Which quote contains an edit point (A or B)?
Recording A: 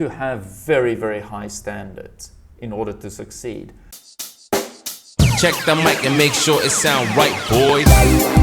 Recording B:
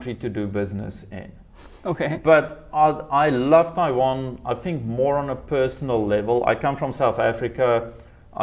A